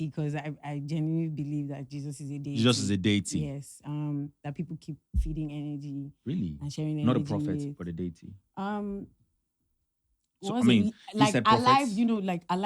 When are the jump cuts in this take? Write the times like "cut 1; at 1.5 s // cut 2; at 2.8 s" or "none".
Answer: none